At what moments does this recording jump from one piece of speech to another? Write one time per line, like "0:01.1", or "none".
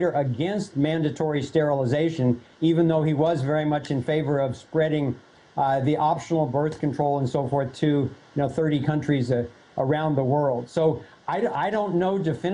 none